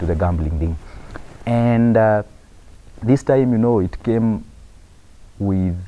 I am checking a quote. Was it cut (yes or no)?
no